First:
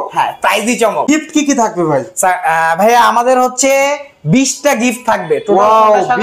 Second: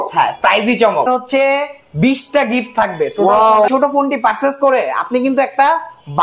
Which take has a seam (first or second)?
second